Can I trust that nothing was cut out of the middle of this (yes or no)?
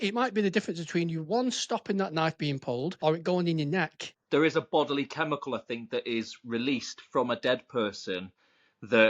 no